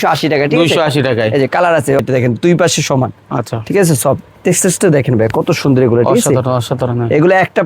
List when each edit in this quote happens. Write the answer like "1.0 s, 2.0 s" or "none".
2.0 s